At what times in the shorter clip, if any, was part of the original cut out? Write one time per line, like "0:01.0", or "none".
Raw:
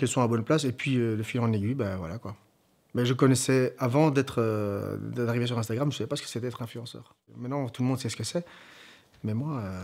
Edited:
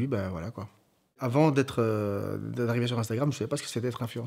0:01.2